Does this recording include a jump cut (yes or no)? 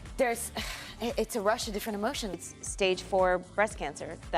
yes